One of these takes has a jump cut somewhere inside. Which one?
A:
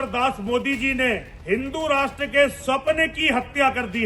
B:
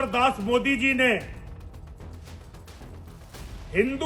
A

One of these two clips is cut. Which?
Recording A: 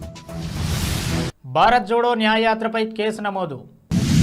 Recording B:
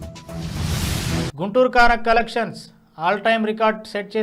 B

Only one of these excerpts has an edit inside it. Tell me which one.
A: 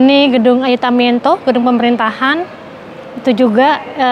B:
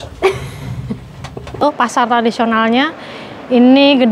B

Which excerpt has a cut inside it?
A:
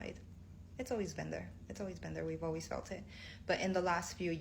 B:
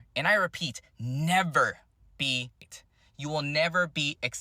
B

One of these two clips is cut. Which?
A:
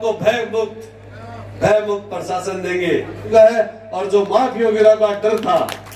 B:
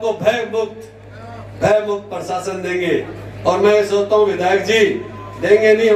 A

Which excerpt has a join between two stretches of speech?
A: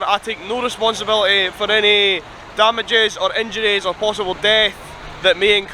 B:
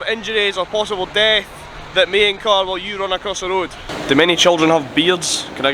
B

